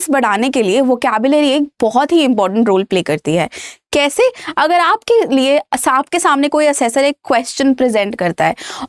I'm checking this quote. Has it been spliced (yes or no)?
no